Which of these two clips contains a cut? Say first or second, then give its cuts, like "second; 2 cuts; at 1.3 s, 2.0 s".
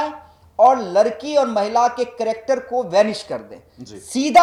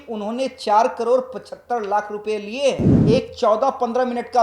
second; 1 cut; at 2.9 s